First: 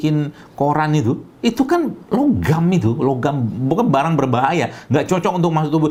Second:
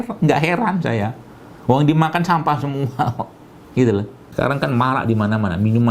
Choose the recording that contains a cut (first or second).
second